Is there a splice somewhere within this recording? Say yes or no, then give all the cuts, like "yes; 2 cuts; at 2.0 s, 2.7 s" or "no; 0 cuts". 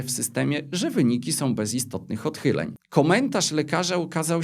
yes; 1 cut; at 2.8 s